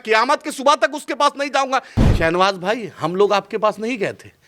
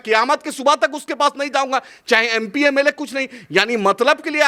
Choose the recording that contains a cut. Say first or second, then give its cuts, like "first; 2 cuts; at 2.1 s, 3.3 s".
first; 1 cut; at 1.9 s